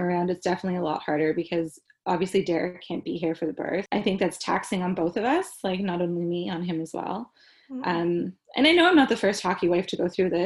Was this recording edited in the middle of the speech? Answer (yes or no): yes